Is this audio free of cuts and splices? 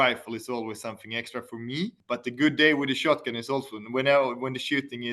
no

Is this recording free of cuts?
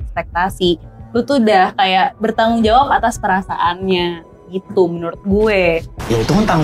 yes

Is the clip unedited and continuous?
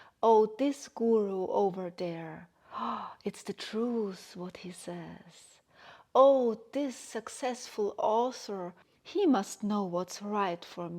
no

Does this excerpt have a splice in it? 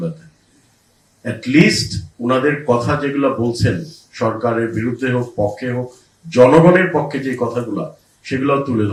no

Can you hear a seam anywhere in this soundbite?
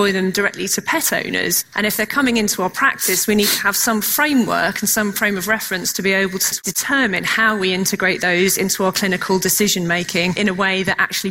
yes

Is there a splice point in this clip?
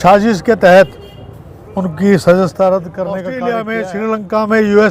yes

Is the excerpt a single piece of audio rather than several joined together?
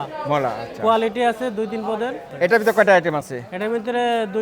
no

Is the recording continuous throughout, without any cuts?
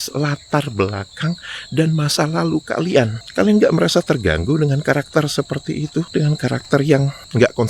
yes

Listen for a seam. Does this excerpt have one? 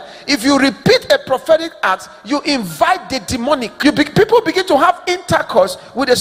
yes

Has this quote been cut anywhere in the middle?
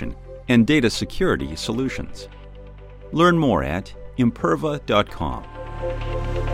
yes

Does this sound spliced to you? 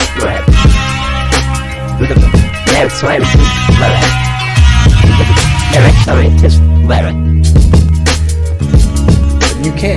no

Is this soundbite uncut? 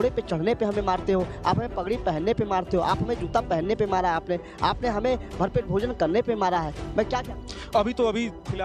yes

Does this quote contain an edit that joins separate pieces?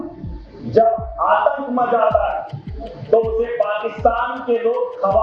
no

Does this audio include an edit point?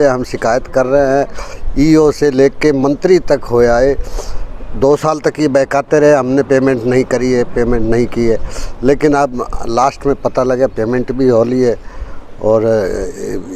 no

